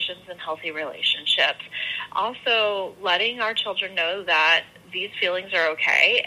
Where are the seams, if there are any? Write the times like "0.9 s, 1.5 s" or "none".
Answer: 2.1 s